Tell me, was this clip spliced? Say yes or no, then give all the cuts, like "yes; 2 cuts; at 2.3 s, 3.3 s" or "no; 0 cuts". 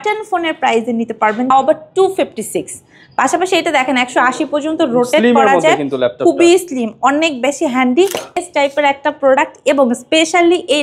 yes; 2 cuts; at 1.5 s, 8.4 s